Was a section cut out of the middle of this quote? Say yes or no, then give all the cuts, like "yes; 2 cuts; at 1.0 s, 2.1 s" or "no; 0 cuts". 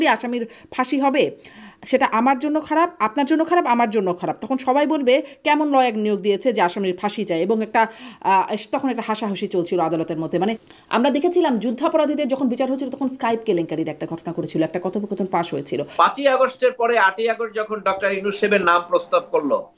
yes; 2 cuts; at 10.7 s, 15.9 s